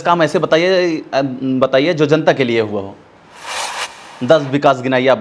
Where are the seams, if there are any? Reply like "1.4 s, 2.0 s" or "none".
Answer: none